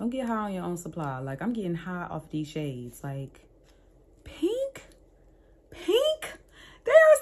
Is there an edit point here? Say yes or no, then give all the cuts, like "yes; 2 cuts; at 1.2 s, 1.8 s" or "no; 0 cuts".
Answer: no; 0 cuts